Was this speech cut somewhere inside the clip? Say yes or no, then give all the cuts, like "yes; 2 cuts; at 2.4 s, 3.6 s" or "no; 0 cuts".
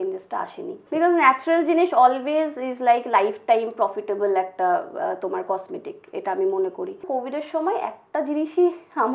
yes; 2 cuts; at 0.8 s, 7.1 s